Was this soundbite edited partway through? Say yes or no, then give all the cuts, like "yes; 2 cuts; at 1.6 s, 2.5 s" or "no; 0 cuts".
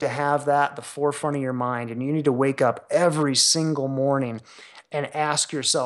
no; 0 cuts